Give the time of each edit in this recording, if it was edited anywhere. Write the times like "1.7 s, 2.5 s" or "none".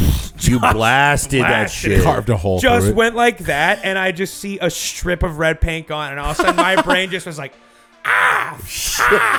none